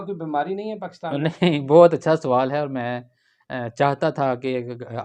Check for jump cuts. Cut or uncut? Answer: uncut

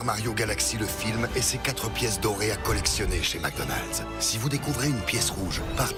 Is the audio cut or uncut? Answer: uncut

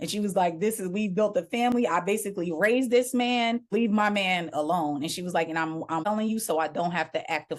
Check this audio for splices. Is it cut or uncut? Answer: cut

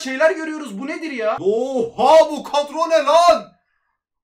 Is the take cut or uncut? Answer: cut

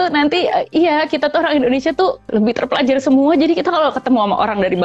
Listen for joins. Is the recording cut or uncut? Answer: cut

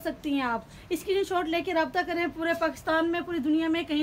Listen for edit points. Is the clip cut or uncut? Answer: uncut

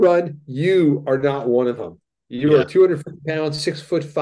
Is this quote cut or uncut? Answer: uncut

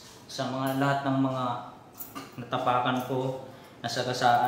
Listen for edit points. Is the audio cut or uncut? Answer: cut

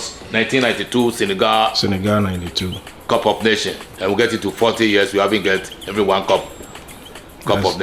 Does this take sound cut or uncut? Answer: uncut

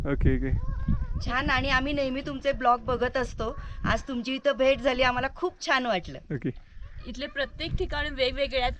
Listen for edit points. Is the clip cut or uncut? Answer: uncut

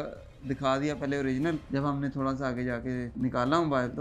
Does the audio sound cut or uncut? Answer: cut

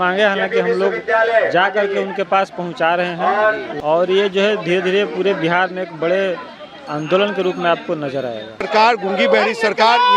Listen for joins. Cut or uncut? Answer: cut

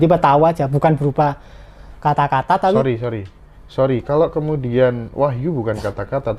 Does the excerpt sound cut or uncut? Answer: uncut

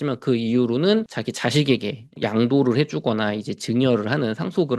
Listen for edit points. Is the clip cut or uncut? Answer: cut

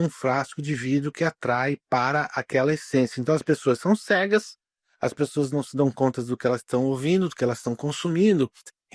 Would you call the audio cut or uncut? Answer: uncut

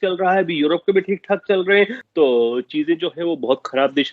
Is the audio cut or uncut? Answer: cut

